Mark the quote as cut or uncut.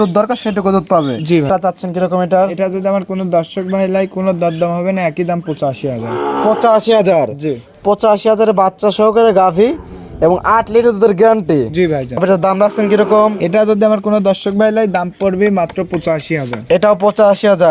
cut